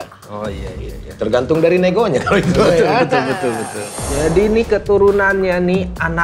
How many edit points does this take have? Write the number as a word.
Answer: one